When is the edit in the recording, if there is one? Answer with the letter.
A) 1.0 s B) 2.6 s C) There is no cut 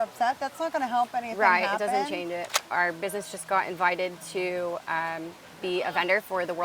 B